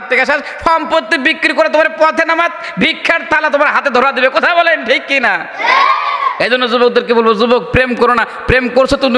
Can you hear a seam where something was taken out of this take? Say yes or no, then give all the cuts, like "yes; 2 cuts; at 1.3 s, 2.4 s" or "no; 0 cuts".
no; 0 cuts